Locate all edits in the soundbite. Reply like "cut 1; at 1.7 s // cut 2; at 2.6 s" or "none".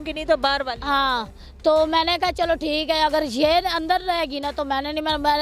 none